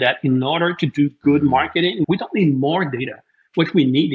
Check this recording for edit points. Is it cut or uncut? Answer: cut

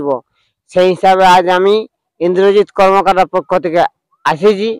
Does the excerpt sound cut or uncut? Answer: uncut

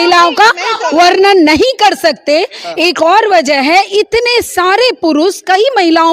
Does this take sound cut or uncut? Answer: uncut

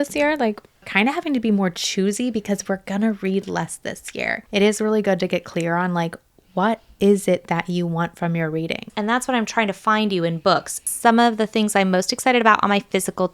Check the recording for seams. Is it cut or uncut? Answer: cut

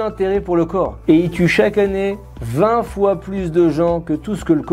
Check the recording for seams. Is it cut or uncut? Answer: cut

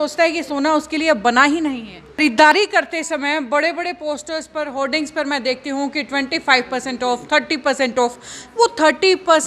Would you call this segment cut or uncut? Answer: cut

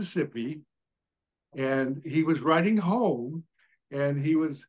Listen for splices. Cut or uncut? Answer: uncut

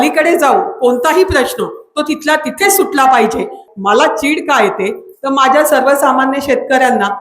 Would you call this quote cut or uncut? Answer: cut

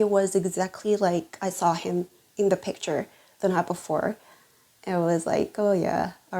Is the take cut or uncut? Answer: uncut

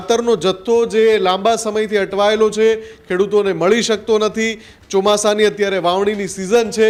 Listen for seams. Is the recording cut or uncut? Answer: uncut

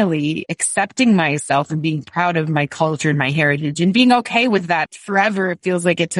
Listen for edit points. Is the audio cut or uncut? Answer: cut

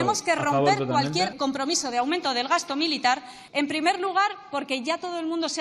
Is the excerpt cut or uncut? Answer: cut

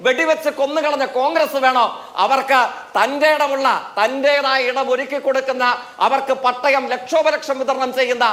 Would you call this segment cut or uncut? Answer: uncut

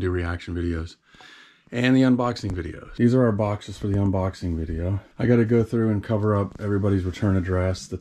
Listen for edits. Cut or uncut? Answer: cut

